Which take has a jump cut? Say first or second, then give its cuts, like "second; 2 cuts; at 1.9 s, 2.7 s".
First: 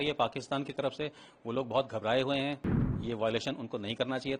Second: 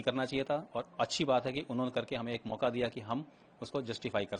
first; 1 cut; at 2.9 s